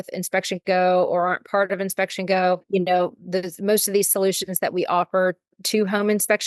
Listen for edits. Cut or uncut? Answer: uncut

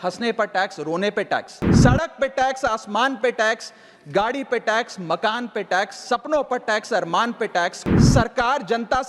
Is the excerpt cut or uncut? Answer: cut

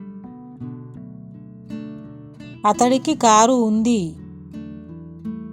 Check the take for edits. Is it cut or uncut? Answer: cut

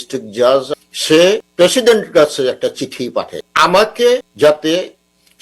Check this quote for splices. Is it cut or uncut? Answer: cut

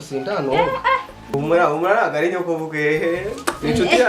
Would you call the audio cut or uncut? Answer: cut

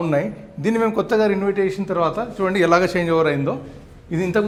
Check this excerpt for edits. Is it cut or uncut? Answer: uncut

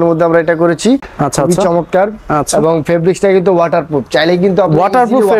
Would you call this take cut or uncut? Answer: cut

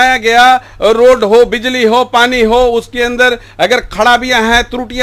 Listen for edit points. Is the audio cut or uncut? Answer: uncut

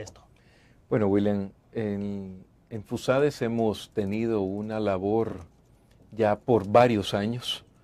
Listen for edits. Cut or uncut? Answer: cut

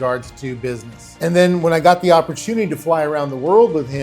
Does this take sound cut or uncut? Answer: cut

